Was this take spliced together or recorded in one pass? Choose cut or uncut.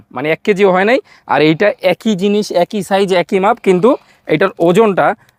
uncut